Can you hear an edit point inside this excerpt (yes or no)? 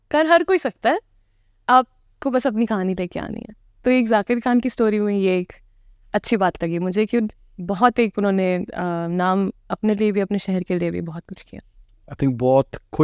no